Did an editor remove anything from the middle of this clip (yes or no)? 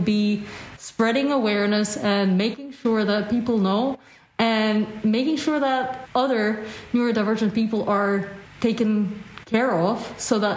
yes